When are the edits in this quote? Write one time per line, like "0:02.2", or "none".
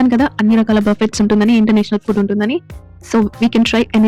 none

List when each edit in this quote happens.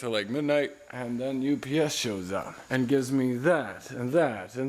0:02.6

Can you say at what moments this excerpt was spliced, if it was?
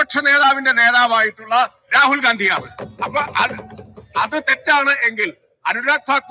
none

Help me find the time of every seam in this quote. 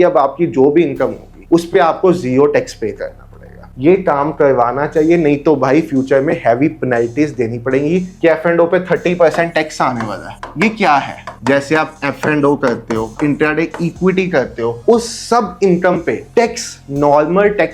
0:03.7
0:08.1
0:11.2
0:13.1
0:14.8

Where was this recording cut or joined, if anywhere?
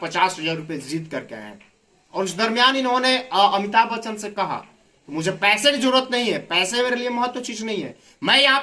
none

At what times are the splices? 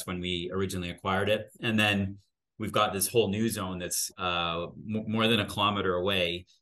0:01.6
0:04.1

